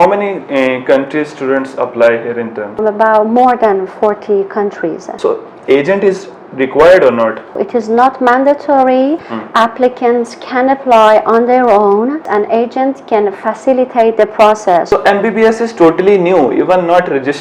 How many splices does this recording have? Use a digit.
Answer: 6